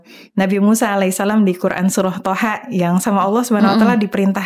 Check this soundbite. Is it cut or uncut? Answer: uncut